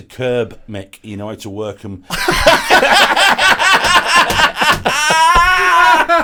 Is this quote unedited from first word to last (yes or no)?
yes